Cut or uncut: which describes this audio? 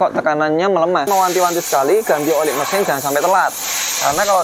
cut